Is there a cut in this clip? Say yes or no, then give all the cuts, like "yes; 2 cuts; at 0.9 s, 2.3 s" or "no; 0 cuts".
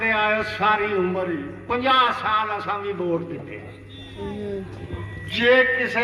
no; 0 cuts